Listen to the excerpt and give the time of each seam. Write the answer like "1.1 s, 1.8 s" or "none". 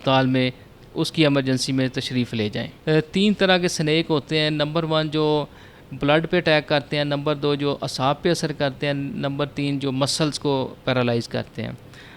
2.7 s